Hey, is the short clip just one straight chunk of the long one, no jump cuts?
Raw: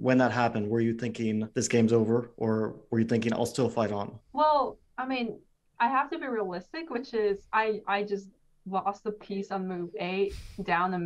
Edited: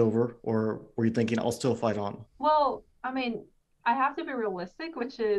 yes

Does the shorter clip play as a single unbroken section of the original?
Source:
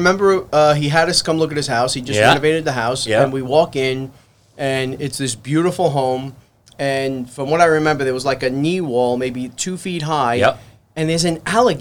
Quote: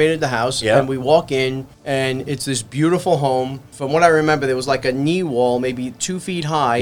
no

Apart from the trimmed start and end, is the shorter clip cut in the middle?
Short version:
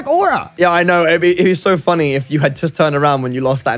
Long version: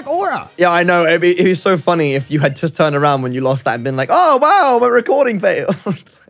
no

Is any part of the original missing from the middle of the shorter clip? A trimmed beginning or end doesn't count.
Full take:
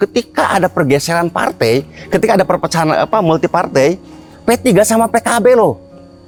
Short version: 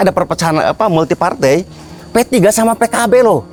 no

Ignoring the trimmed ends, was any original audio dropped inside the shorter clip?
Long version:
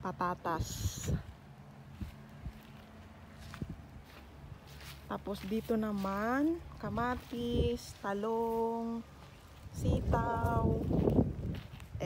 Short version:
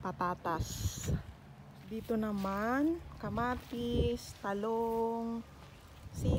yes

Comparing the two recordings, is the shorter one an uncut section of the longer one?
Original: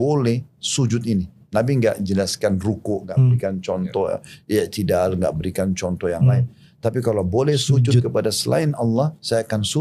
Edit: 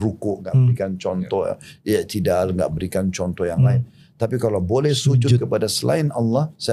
yes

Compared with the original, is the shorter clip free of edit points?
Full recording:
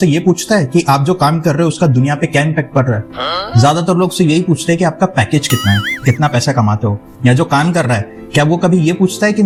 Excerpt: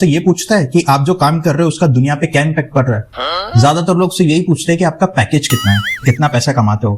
yes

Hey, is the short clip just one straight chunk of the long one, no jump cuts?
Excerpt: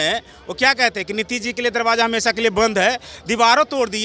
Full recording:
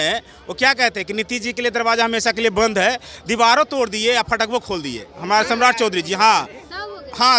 yes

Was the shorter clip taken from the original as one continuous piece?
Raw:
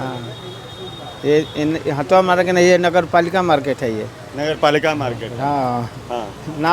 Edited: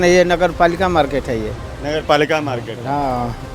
yes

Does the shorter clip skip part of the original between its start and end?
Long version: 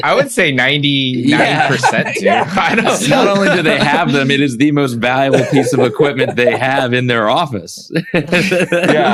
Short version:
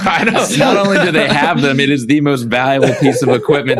no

